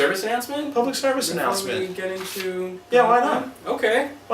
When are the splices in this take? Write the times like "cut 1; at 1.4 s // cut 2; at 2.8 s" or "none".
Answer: cut 1; at 2.7 s